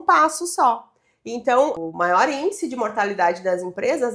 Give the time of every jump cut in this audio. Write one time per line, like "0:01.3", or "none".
0:01.7